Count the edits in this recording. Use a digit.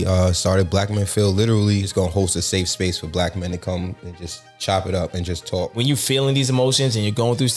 2